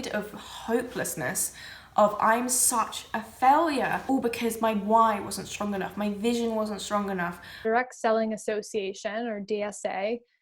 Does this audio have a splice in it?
yes; 2 cuts; at 4.0 s, 7.6 s

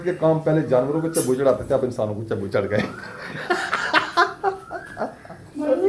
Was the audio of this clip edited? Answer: yes; 1 cut; at 3.4 s

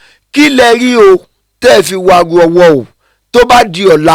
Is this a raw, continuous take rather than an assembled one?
yes; 0 cuts

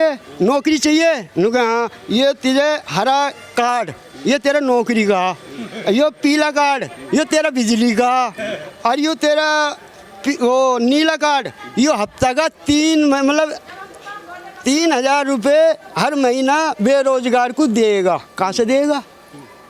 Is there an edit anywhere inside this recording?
no; 0 cuts

